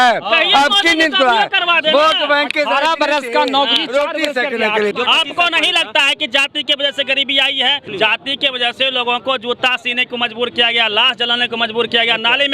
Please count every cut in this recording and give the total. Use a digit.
1